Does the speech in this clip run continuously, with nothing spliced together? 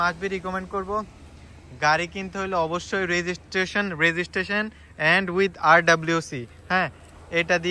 yes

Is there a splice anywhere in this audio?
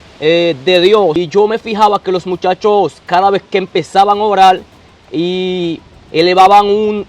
yes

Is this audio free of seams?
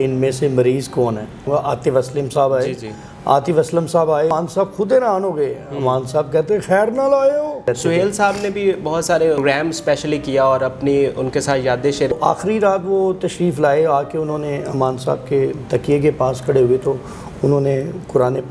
no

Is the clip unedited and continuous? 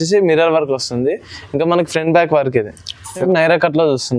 no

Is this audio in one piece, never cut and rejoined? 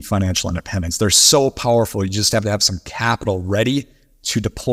yes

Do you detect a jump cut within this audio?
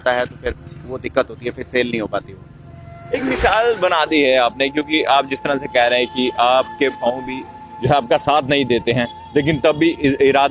no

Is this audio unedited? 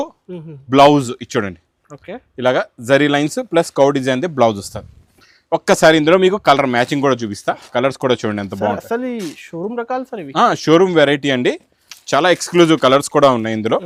yes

